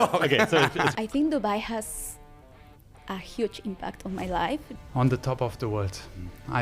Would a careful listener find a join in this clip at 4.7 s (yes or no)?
yes